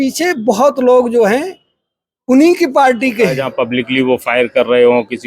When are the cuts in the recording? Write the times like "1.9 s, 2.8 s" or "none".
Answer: 3.4 s